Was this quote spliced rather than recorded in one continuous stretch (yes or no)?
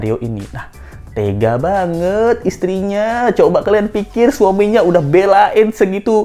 no